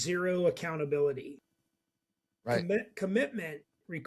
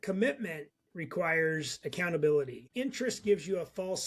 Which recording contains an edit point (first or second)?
second